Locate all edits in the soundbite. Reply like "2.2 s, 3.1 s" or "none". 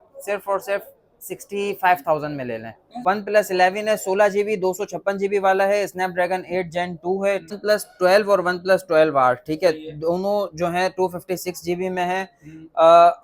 2.9 s, 7.6 s